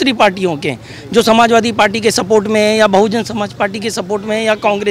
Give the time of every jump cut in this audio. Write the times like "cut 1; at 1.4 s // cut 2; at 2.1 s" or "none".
none